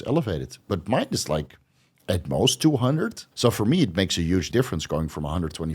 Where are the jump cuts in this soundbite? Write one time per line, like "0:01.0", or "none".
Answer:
0:03.2
0:04.5